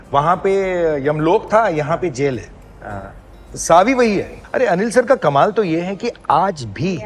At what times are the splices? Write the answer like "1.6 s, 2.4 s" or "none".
4.4 s